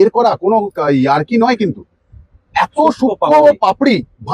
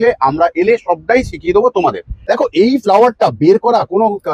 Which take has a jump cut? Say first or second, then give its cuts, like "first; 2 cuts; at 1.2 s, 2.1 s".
second; 1 cut; at 2.1 s